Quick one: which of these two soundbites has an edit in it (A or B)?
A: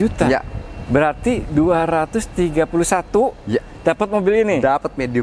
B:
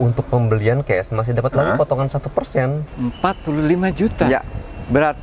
B